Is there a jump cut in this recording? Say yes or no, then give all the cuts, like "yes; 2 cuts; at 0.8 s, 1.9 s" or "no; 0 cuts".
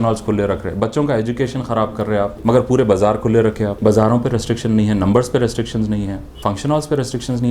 yes; 3 cuts; at 2.4 s, 3.7 s, 6.2 s